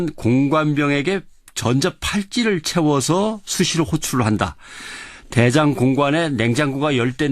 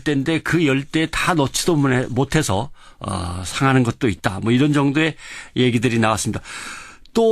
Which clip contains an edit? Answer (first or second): first